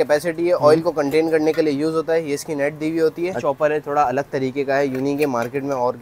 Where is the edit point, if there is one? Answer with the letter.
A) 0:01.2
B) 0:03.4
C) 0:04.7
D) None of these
B